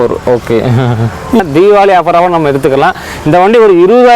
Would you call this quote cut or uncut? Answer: cut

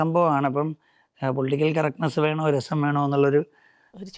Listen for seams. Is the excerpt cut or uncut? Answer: uncut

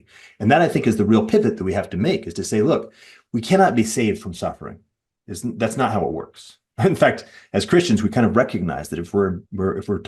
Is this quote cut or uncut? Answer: uncut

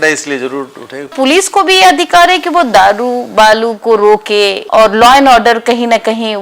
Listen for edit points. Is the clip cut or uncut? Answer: cut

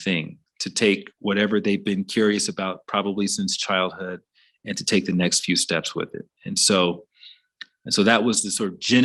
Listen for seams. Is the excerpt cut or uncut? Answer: uncut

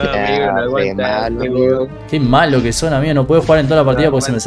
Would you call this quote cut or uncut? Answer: uncut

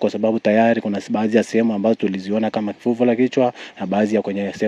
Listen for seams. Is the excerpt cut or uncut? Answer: uncut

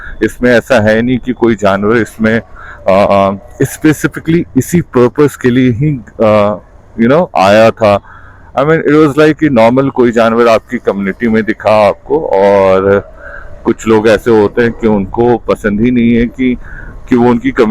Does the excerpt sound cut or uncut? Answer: uncut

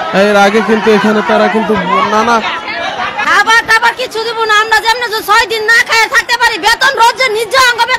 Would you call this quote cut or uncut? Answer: cut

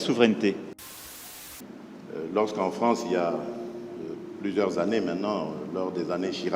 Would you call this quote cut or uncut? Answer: cut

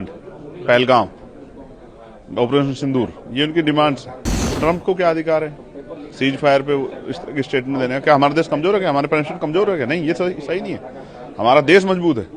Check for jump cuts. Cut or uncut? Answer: cut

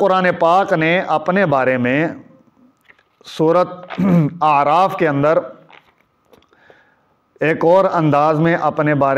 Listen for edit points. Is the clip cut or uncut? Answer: uncut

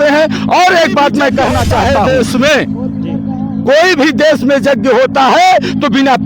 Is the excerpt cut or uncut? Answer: cut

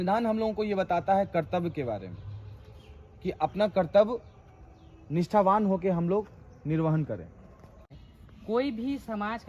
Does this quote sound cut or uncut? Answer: cut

